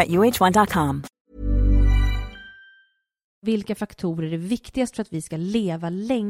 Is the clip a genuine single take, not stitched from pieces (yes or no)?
no